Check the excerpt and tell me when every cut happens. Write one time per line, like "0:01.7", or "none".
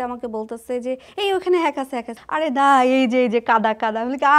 0:02.2